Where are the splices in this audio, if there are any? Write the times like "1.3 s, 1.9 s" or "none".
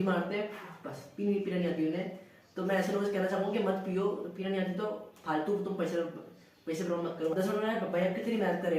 7.3 s